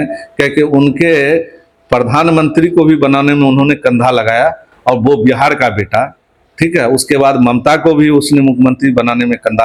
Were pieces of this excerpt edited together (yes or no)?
no